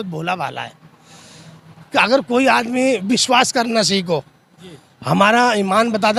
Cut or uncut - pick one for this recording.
uncut